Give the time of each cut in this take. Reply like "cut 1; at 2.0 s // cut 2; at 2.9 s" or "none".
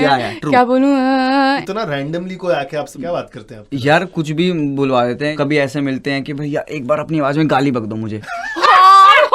cut 1; at 1.6 s // cut 2; at 2.9 s // cut 3; at 5.3 s